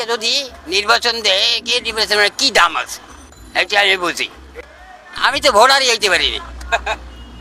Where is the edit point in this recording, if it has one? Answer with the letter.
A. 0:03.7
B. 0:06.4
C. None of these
C